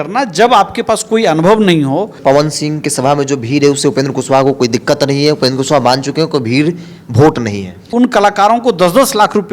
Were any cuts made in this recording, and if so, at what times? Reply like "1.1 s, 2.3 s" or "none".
2.1 s, 7.9 s